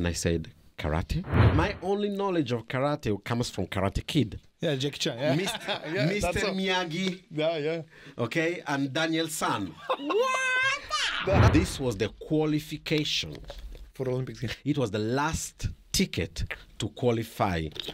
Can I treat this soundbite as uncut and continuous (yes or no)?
no